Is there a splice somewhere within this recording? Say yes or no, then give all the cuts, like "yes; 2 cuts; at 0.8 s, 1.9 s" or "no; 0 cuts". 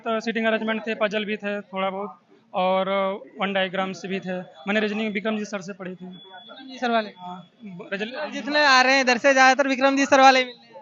no; 0 cuts